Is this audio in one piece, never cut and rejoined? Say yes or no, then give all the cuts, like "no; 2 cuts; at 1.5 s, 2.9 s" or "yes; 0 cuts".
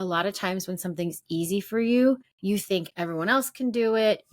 no; 1 cut; at 2.3 s